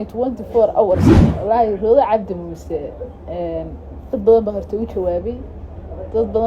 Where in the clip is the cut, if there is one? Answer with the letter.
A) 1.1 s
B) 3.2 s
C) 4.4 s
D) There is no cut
A